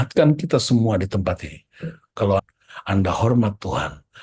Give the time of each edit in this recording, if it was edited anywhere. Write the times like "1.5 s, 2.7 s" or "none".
2.4 s